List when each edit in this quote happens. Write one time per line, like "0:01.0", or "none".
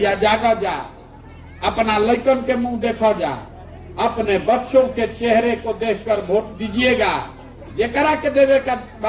none

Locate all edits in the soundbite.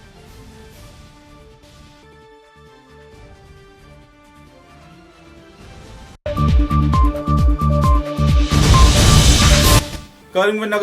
0:06.2
0:09.8

